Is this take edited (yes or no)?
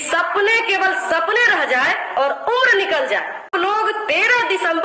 yes